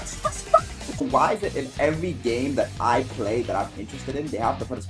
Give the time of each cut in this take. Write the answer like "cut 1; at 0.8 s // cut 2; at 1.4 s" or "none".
cut 1; at 1.0 s